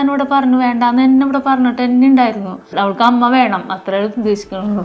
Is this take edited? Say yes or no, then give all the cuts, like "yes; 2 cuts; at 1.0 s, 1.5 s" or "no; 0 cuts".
yes; 1 cut; at 2.7 s